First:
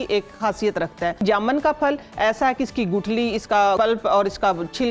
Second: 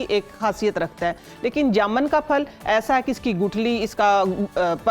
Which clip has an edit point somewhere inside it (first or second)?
first